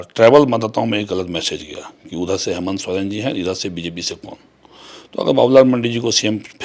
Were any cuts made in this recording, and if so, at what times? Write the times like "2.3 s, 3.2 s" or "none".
none